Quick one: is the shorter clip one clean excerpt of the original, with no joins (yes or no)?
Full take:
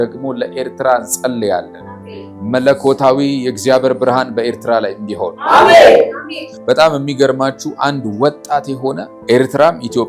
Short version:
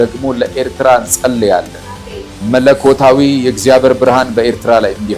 yes